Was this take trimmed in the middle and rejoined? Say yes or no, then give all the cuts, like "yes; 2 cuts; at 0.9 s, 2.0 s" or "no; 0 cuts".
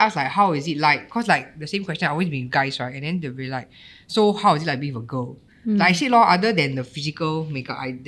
no; 0 cuts